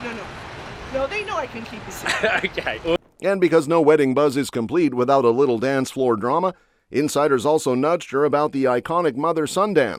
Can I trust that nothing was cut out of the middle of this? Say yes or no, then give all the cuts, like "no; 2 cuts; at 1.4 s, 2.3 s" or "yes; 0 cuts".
yes; 0 cuts